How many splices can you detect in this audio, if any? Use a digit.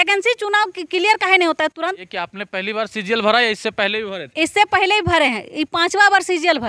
1